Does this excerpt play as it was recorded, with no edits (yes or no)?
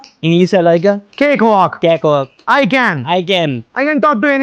yes